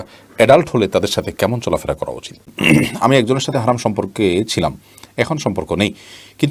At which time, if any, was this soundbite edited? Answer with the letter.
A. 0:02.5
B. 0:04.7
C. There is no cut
A